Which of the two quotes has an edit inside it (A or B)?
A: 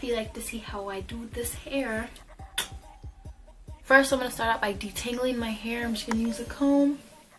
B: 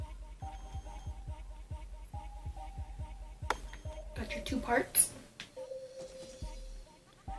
A